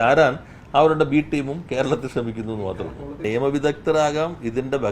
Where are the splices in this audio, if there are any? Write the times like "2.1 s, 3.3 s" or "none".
3.2 s